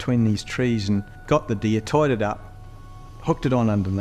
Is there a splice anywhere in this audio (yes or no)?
no